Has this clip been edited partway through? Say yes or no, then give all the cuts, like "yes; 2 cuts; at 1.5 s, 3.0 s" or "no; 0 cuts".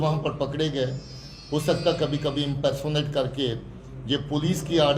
no; 0 cuts